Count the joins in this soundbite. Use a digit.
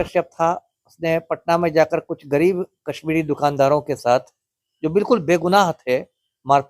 0